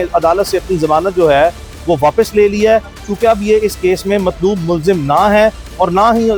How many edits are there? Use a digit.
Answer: 0